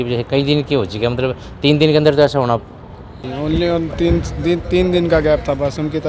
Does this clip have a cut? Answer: yes; 1 cut; at 3.2 s

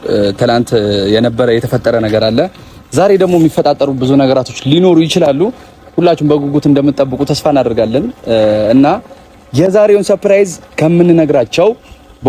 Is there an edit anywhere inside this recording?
no; 0 cuts

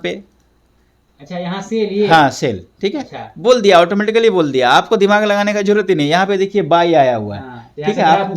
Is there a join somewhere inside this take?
no; 0 cuts

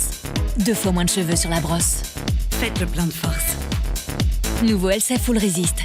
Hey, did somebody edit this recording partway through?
no; 0 cuts

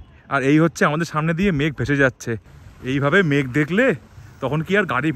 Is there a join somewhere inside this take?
yes; 1 cut; at 2.5 s

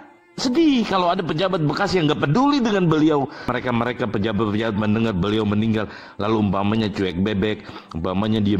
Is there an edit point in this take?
yes; 1 cut; at 3.4 s

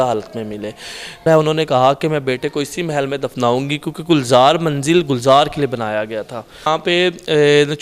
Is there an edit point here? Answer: yes; 2 cuts; at 1.3 s, 6.7 s

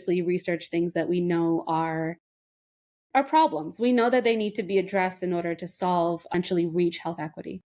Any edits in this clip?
yes; 1 cut; at 6.3 s

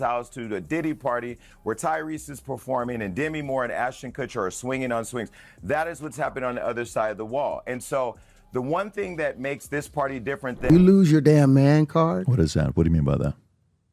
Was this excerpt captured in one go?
no; 1 cut; at 10.6 s

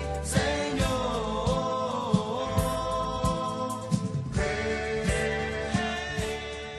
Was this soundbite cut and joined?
no; 0 cuts

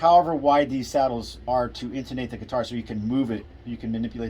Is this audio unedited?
no; 1 cut; at 1.4 s

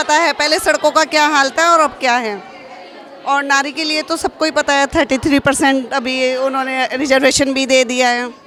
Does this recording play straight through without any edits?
yes; 0 cuts

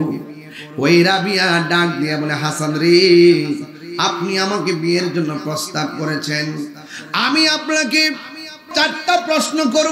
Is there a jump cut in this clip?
yes; 1 cut; at 8.7 s

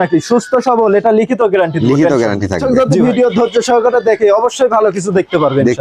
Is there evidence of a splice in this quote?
yes; 1 cut; at 2.6 s

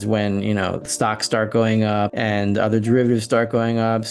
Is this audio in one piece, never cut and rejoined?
no; 1 cut; at 2.1 s

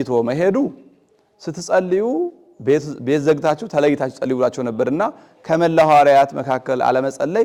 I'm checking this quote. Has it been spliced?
no; 0 cuts

